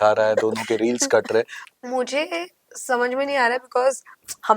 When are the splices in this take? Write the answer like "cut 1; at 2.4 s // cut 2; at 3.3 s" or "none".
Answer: cut 1; at 1.6 s